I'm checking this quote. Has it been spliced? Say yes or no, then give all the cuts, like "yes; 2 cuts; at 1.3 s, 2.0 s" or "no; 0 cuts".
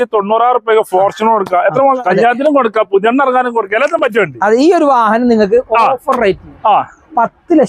yes; 1 cut; at 2.0 s